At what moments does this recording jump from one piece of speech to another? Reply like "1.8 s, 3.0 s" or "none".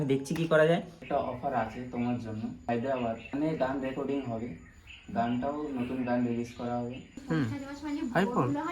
1.0 s, 3.0 s, 7.1 s